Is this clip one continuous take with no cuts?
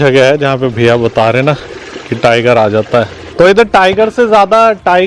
no; 1 cut; at 3.2 s

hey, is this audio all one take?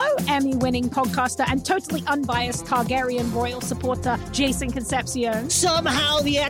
yes; 0 cuts

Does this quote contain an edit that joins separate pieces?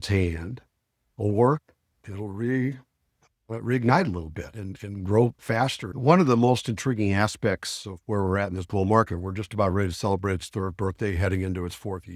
yes; 1 cut; at 5.9 s

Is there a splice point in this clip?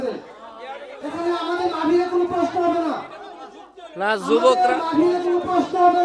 yes; 1 cut; at 0.9 s

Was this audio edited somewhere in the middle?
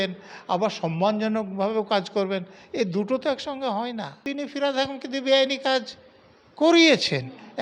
yes; 1 cut; at 4.2 s

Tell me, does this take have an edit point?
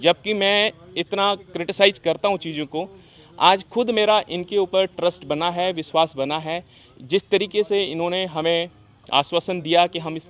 no; 0 cuts

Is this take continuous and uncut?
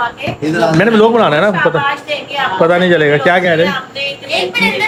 yes; 0 cuts

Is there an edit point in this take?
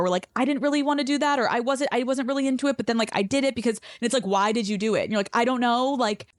no; 0 cuts

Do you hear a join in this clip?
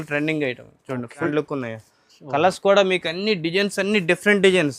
yes; 1 cut; at 1.3 s

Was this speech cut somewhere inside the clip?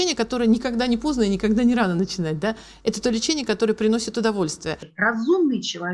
yes; 1 cut; at 4.9 s

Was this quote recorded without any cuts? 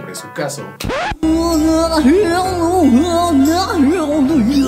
yes; 0 cuts

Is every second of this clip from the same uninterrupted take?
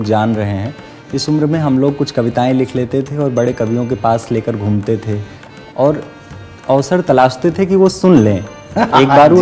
yes; 0 cuts

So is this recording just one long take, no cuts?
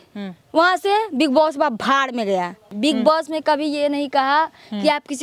no; 1 cut; at 2.7 s

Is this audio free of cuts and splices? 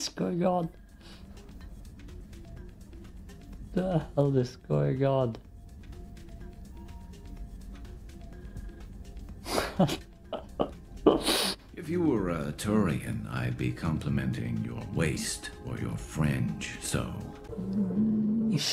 no; 1 cut; at 17.4 s

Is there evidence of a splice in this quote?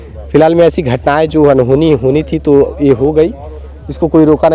no; 0 cuts

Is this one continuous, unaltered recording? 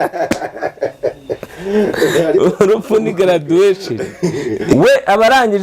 no; 1 cut; at 4.7 s

